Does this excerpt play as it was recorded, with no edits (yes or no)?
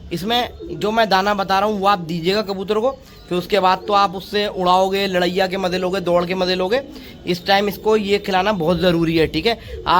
yes